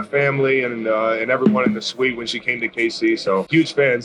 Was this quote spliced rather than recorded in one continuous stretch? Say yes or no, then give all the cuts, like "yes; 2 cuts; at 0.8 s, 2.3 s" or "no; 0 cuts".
no; 0 cuts